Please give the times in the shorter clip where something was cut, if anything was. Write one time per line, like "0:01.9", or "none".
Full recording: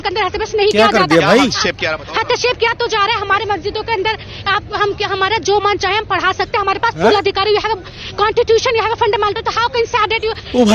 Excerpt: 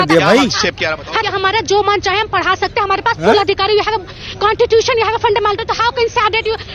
0:01.2